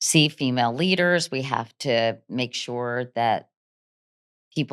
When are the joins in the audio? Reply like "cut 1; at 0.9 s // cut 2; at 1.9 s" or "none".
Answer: none